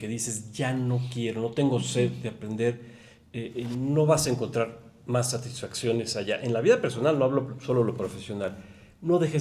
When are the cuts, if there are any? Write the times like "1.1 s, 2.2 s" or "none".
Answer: none